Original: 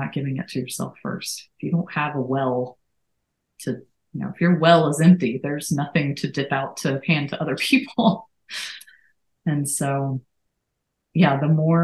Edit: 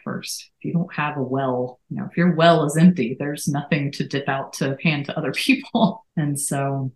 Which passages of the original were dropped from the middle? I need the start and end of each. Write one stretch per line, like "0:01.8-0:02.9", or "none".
0:02.8-0:04.1
0:08.3-0:09.3